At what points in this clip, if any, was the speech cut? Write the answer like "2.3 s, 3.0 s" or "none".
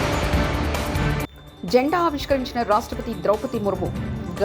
1.4 s